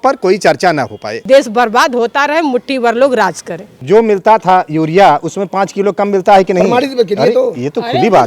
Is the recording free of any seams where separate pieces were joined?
no; 2 cuts; at 1.1 s, 3.6 s

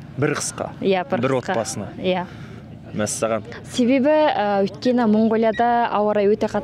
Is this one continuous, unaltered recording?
yes; 0 cuts

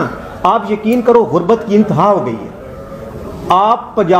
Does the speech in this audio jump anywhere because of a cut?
no; 0 cuts

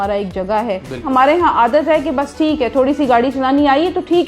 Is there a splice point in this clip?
yes; 1 cut; at 1.1 s

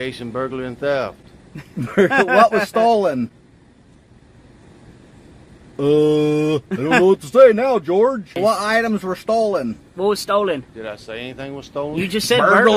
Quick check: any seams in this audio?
yes; 2 cuts; at 0.9 s, 8.4 s

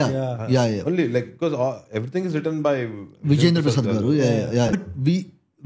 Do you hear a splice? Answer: yes; 1 cut; at 4.7 s

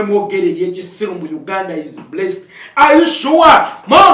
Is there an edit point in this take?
no; 0 cuts

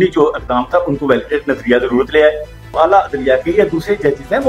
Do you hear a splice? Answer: yes; 1 cut; at 2.7 s

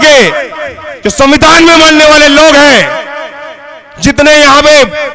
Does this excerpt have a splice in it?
no; 0 cuts

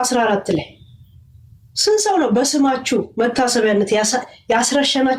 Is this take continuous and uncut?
yes; 0 cuts

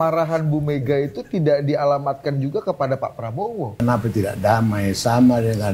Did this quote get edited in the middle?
yes; 1 cut; at 3.7 s

